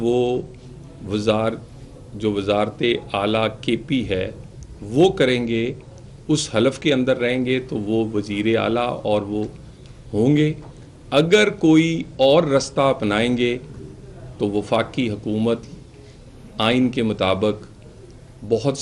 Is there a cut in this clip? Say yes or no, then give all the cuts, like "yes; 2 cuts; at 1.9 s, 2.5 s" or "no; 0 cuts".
no; 0 cuts